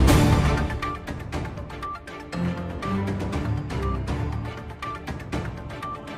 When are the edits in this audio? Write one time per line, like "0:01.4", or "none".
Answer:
none